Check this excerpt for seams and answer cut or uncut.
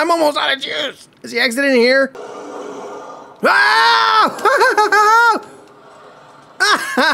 cut